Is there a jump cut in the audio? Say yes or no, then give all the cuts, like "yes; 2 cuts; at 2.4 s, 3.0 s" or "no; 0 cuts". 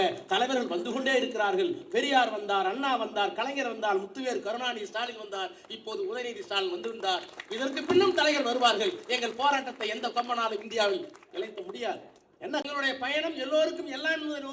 yes; 1 cut; at 12.6 s